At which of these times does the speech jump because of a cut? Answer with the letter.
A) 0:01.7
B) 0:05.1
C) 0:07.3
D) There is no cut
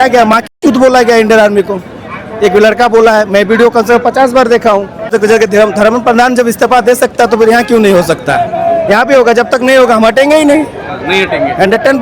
B